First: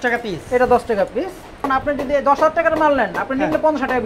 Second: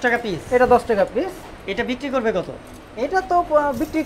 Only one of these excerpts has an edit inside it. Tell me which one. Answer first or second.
first